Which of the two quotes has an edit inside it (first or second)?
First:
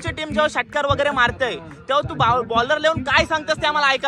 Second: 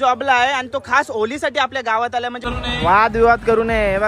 second